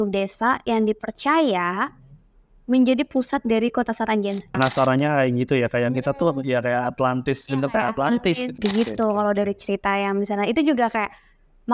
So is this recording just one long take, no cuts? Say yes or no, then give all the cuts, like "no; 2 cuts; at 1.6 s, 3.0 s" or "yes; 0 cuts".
no; 2 cuts; at 4.4 s, 8.5 s